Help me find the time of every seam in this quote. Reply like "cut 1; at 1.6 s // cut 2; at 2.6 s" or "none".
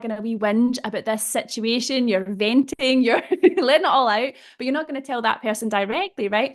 none